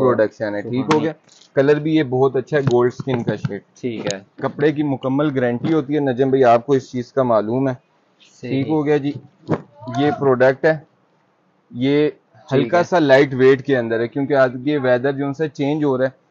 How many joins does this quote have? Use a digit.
0